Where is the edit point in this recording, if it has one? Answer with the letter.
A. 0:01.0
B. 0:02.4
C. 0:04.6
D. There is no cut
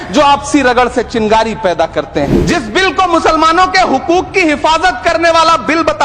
B